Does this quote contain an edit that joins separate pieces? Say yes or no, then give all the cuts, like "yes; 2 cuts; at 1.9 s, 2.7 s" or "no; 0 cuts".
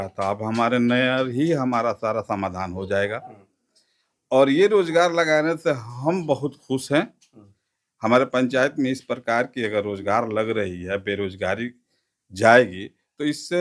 no; 0 cuts